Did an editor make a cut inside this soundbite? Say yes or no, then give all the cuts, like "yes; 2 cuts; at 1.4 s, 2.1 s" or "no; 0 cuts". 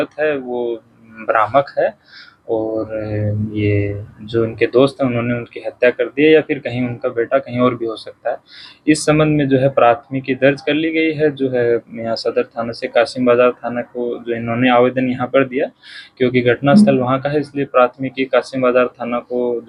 no; 0 cuts